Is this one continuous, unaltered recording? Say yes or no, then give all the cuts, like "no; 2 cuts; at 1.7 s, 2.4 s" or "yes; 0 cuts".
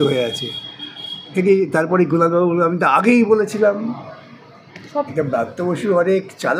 no; 2 cuts; at 1.3 s, 5.1 s